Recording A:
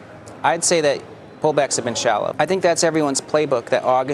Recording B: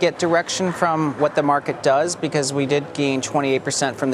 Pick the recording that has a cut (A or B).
A